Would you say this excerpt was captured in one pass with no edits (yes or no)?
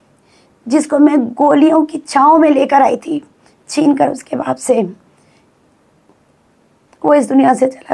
yes